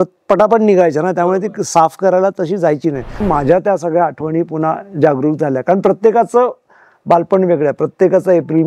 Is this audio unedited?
no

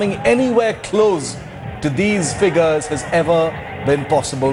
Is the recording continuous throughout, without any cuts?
yes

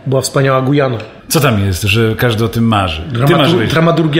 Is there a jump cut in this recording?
yes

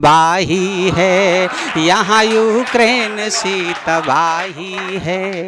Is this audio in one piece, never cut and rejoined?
yes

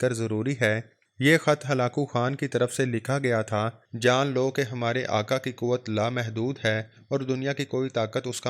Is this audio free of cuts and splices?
no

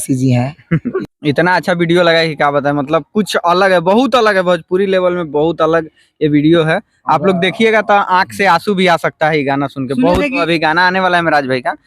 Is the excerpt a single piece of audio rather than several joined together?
no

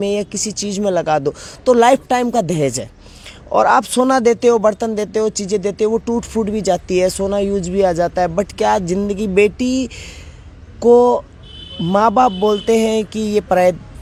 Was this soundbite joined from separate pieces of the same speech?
no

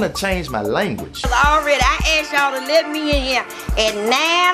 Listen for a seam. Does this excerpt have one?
yes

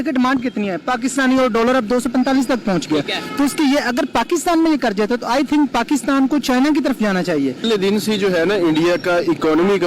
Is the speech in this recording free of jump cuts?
no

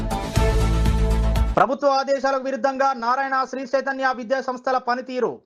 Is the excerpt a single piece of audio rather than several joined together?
no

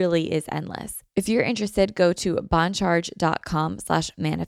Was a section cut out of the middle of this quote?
yes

